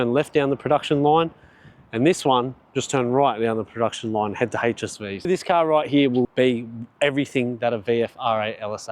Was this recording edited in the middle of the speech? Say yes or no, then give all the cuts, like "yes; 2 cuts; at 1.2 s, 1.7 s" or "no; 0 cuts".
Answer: yes; 2 cuts; at 5.3 s, 6.3 s